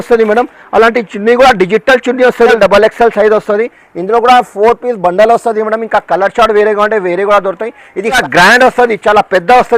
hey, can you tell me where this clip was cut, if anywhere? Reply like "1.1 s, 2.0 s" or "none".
2.5 s, 8.2 s